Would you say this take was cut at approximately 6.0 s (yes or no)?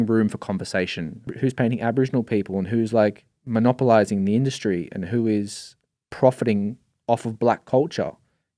no